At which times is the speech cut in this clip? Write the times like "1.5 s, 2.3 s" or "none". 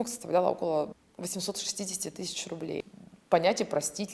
1.0 s, 2.9 s